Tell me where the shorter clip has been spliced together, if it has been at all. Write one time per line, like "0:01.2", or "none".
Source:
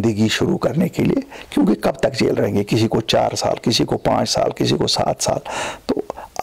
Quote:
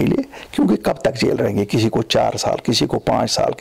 none